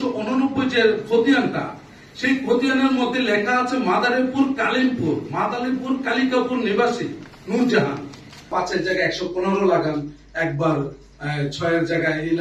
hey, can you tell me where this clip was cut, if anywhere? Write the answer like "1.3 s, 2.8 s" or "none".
8.5 s